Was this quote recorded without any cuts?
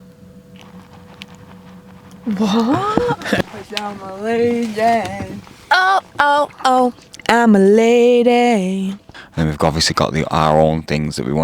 no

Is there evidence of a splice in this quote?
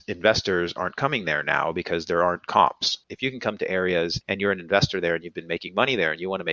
yes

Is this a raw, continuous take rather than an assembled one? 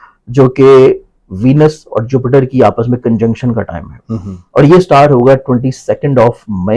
yes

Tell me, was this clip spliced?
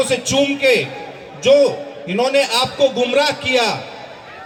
no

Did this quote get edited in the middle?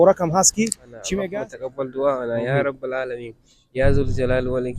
yes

